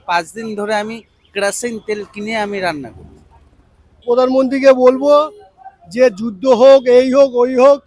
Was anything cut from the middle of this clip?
yes; 1 cut; at 3.9 s

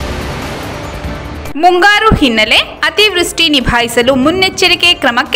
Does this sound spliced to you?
yes; 1 cut; at 1.4 s

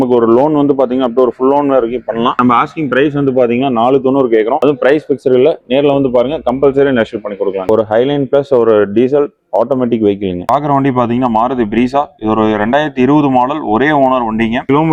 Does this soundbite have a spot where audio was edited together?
yes; 1 cut; at 7.6 s

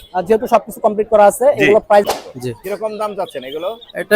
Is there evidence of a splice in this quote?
yes; 1 cut; at 2.1 s

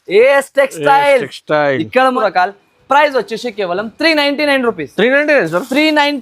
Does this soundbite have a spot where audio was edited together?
yes; 1 cut; at 2.2 s

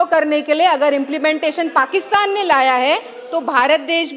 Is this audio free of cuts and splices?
yes; 0 cuts

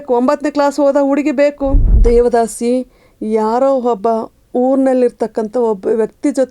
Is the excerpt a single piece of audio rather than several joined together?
no; 1 cut; at 1.9 s

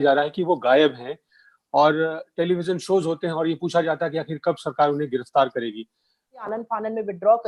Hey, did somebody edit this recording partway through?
yes; 1 cut; at 6.5 s

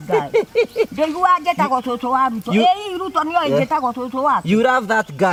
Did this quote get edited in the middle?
no; 0 cuts

